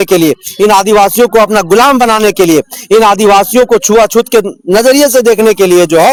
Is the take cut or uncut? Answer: uncut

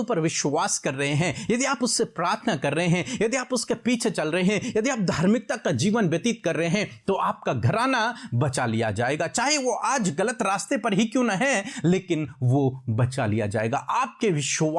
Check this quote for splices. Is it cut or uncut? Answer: uncut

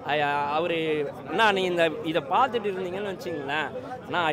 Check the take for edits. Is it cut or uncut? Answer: cut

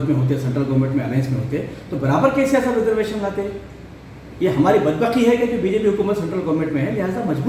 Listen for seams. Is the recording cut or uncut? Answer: uncut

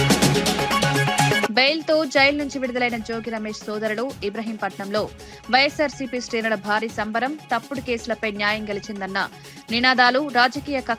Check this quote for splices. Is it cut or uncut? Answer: cut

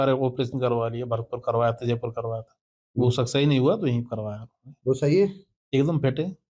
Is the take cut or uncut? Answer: uncut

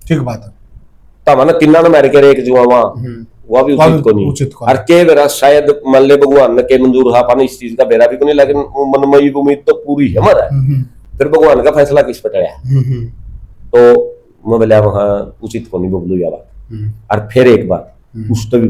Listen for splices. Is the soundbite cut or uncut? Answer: uncut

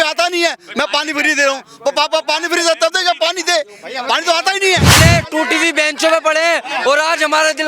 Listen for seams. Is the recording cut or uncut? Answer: cut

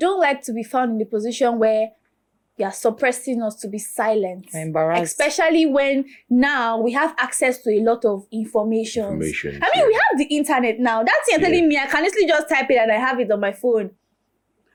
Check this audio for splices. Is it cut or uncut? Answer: uncut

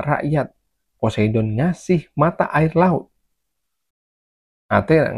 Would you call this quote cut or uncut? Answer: uncut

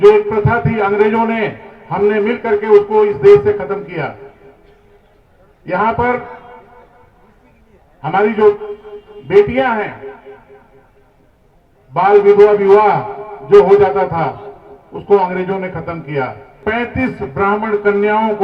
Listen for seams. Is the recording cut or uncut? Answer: cut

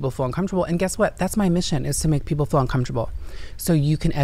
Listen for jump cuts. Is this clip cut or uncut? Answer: uncut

